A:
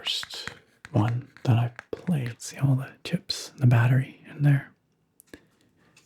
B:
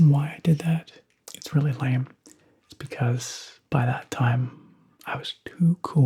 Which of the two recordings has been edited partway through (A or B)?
A